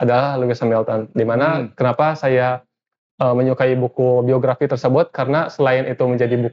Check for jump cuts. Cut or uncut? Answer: uncut